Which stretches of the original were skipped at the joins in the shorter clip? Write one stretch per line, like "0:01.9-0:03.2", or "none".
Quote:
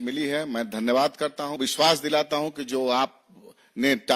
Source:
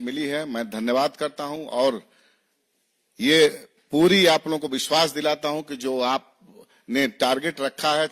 0:01.6-0:04.7